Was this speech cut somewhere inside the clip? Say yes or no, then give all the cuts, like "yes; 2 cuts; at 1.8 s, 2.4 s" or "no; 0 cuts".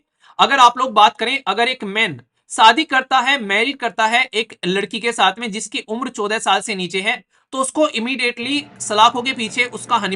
no; 0 cuts